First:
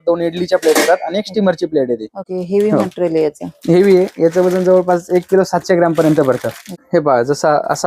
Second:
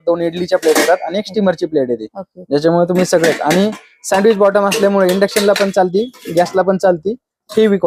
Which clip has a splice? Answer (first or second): first